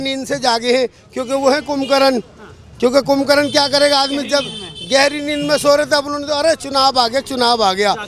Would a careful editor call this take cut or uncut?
uncut